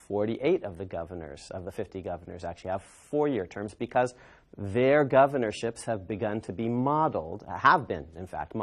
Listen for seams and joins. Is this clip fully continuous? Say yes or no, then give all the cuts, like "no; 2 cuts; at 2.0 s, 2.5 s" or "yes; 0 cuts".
no; 1 cut; at 5.5 s